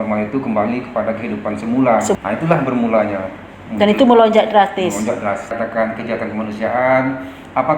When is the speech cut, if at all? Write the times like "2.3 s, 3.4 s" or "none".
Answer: 2.2 s, 5.5 s